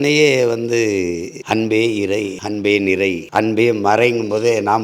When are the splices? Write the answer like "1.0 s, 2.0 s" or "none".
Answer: 1.3 s, 2.4 s, 3.2 s